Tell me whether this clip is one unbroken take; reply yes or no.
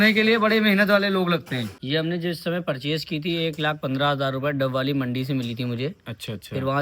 no